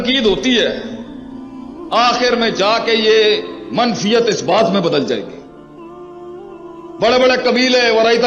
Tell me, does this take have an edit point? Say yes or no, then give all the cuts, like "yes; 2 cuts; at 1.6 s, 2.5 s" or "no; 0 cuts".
no; 0 cuts